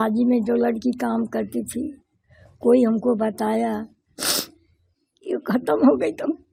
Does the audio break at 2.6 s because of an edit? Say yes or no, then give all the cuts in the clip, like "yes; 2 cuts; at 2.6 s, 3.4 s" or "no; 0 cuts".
no; 0 cuts